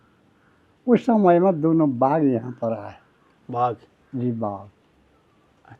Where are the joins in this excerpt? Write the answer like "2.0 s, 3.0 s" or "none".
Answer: none